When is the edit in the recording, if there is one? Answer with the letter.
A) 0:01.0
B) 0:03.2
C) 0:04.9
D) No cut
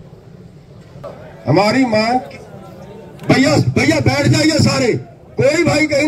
A